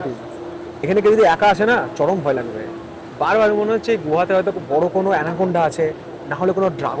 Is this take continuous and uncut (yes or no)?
yes